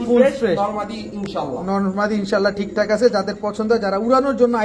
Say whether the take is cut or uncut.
uncut